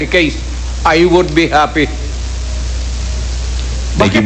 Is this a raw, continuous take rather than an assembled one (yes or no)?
yes